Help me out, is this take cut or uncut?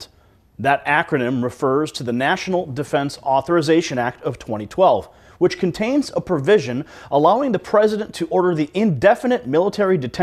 uncut